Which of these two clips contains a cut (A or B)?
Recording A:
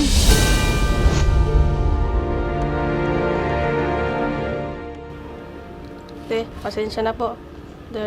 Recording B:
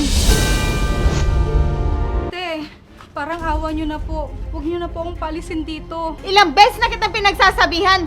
B